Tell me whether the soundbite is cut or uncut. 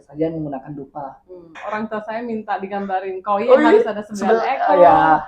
cut